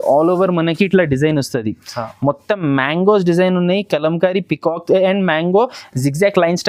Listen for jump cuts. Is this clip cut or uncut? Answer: uncut